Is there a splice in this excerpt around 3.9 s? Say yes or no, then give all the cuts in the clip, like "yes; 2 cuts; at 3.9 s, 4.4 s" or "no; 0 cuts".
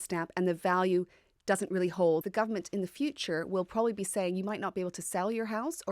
no; 1 cut; at 2.2 s